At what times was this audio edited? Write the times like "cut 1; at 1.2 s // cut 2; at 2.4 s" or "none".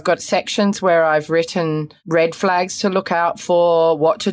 cut 1; at 1.9 s